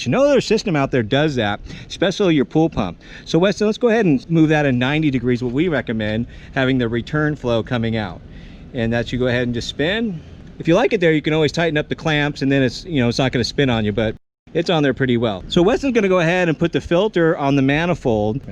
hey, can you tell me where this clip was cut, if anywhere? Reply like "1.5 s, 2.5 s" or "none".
4.3 s